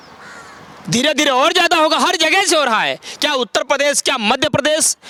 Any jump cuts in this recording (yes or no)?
no